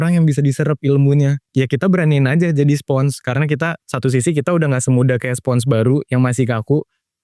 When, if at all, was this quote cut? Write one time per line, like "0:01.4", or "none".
0:01.4
0:03.8